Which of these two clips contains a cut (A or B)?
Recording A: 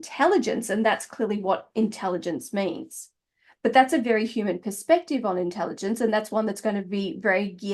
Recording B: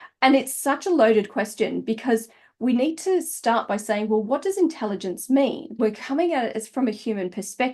B